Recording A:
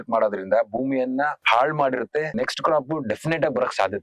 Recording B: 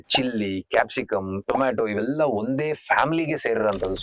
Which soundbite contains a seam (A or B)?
A